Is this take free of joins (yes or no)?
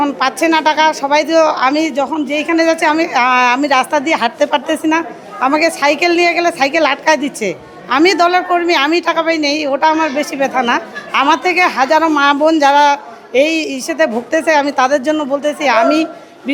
yes